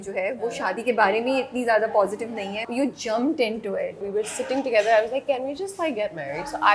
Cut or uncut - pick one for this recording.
cut